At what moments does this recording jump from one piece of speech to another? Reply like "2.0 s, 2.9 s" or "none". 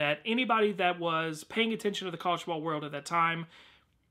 2.6 s